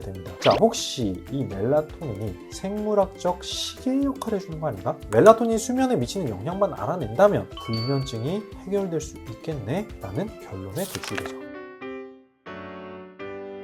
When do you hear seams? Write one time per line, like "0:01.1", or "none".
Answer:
0:11.0